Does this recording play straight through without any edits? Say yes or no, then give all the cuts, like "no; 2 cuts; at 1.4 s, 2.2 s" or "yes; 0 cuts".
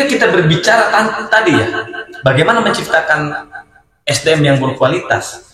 yes; 0 cuts